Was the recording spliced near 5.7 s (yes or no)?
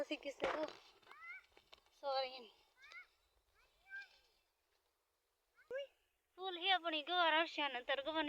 yes